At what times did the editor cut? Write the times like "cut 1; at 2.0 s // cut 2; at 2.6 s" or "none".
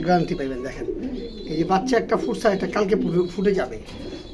none